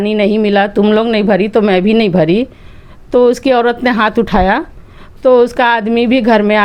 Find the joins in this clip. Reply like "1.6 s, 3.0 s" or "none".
none